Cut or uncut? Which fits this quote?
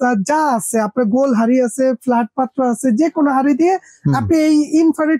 uncut